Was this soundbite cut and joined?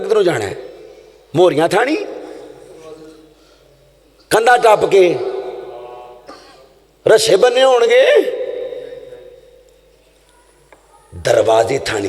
no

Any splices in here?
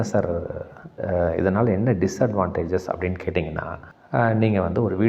yes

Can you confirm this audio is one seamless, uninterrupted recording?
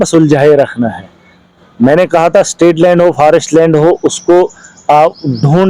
yes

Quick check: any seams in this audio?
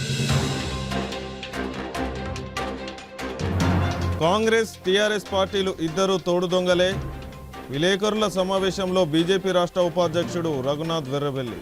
no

